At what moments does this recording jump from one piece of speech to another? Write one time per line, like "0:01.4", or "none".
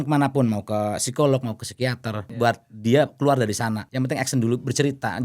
0:02.3
0:03.8